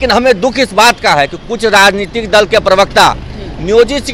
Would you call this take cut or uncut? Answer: uncut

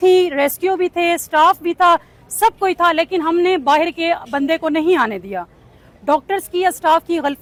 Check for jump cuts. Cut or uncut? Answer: uncut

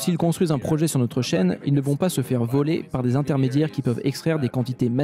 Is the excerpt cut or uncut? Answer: uncut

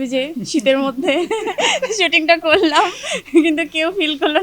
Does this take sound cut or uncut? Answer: uncut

